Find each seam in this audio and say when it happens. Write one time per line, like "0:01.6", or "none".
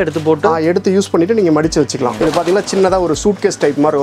0:02.1